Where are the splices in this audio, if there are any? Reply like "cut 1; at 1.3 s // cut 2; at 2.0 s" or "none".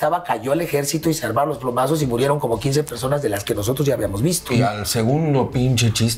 cut 1; at 4.5 s